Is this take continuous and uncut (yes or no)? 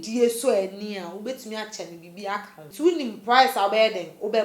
no